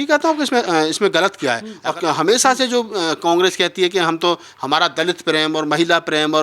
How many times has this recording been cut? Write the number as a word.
one